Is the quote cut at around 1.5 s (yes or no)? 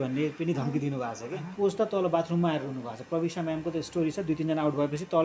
yes